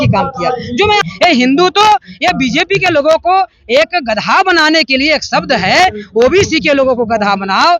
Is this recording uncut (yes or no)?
no